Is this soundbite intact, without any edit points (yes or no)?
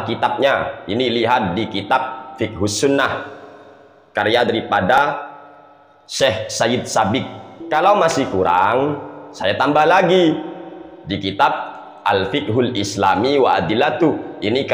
no